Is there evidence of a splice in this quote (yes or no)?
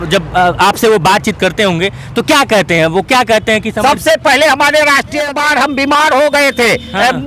yes